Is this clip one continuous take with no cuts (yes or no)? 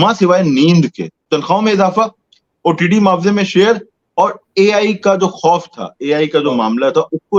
no